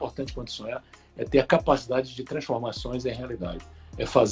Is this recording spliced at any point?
no; 0 cuts

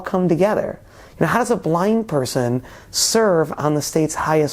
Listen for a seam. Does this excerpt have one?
no; 0 cuts

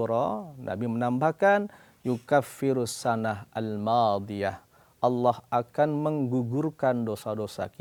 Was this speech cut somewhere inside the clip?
no; 0 cuts

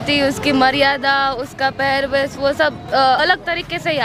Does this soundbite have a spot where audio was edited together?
no; 0 cuts

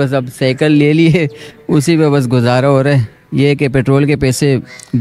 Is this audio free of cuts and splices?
yes; 0 cuts

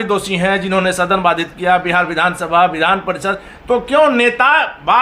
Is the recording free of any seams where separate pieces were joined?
yes; 0 cuts

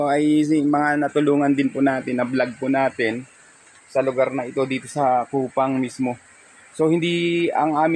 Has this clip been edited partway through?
no; 0 cuts

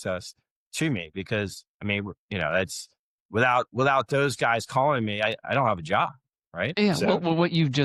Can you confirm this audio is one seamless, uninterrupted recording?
yes; 0 cuts

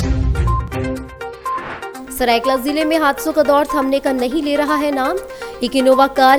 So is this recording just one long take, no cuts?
yes; 0 cuts

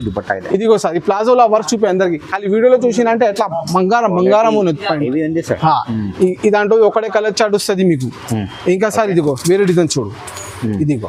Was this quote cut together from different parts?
no; 0 cuts

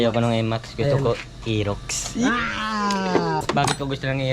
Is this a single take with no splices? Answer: no; 1 cut; at 3.4 s

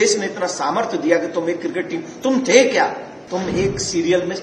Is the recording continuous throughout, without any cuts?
no; 1 cut; at 3.1 s

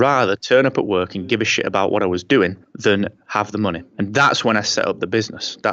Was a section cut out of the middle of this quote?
yes; 2 cuts; at 2.7 s, 3.8 s

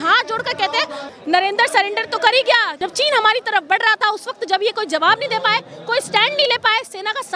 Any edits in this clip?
yes; 2 cuts; at 1.0 s, 2.7 s

